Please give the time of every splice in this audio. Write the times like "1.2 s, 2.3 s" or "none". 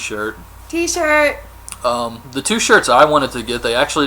3.1 s